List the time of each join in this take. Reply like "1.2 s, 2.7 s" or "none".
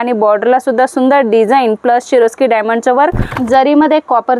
3.4 s

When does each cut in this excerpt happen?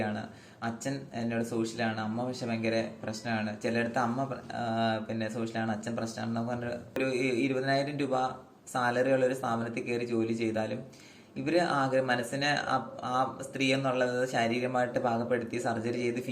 7.0 s

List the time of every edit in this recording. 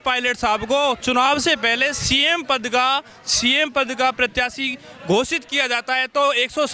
none

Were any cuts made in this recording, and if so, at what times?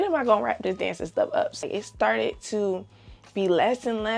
1.6 s

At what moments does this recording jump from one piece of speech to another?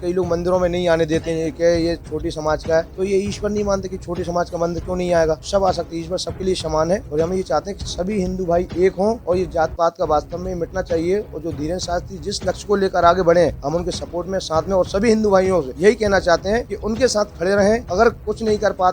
2.9 s, 5.4 s, 7.1 s, 9.2 s, 13.6 s, 15.7 s, 16.7 s, 17.9 s

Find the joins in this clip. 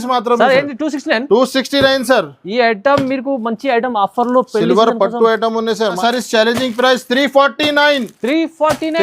6.0 s

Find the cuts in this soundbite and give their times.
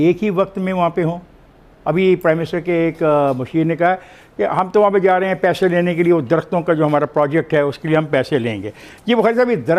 none

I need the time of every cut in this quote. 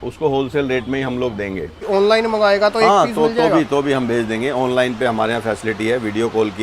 1.8 s

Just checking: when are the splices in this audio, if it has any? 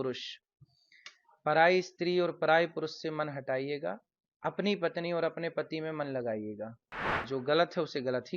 7.2 s

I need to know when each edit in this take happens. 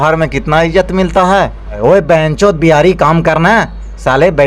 1.8 s

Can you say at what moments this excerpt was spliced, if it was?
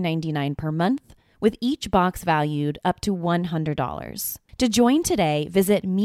none

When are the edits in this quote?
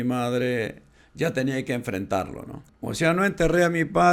2.7 s

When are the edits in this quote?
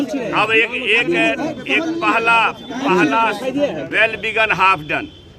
3.8 s

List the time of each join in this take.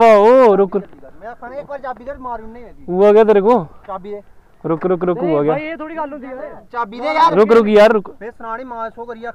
none

